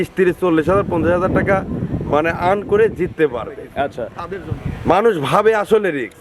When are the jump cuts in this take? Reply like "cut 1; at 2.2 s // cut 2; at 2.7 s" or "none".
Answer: cut 1; at 4.2 s